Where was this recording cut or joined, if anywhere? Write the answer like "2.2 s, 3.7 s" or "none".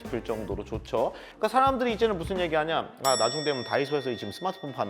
1.3 s